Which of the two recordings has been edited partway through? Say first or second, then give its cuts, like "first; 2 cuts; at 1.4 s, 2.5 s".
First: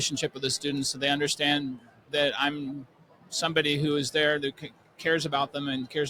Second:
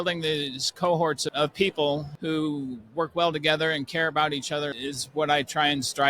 second; 3 cuts; at 1.3 s, 2.1 s, 4.8 s